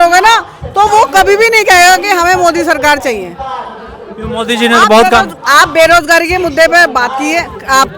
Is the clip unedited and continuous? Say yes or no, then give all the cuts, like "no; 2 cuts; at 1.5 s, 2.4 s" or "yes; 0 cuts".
yes; 0 cuts